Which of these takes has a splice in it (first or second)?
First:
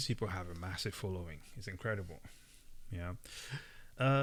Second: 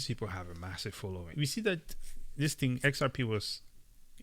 second